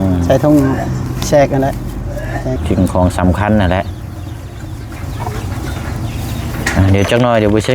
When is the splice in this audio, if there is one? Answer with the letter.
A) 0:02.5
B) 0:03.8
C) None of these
A